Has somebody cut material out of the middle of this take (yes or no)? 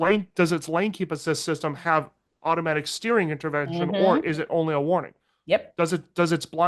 no